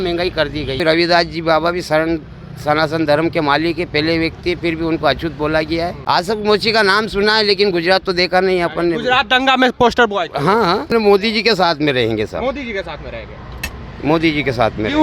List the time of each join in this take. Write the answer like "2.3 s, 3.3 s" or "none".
0.8 s, 6.0 s, 10.9 s